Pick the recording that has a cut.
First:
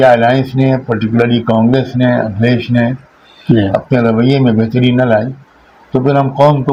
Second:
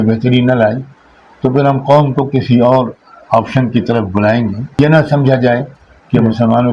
second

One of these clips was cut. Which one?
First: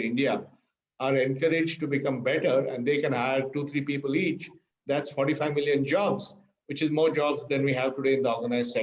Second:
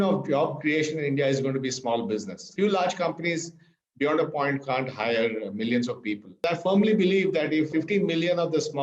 second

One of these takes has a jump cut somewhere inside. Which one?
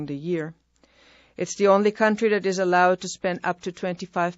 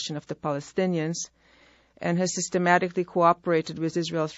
first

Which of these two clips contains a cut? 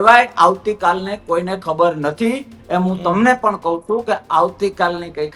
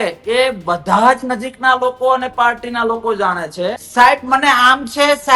second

